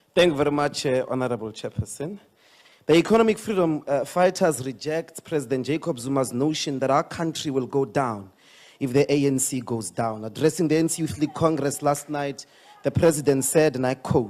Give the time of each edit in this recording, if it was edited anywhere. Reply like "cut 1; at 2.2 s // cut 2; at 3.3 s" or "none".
cut 1; at 12.0 s